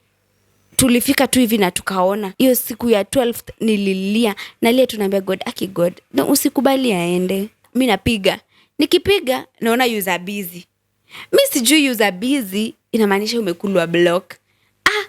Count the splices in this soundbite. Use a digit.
2